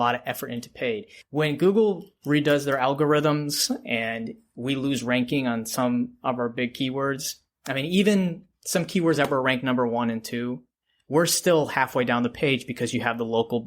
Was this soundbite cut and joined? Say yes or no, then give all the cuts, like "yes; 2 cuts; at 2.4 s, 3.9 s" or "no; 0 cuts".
yes; 1 cut; at 1.1 s